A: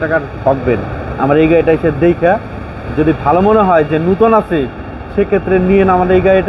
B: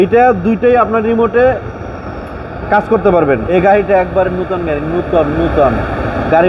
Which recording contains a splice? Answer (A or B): B